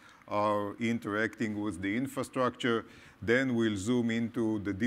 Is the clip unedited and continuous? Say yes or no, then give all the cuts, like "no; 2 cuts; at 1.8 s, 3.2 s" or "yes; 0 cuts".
no; 1 cut; at 1.5 s